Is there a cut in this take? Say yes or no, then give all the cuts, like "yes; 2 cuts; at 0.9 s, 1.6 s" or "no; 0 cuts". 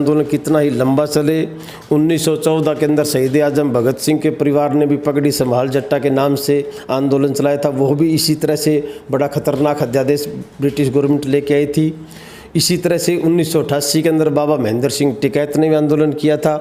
no; 0 cuts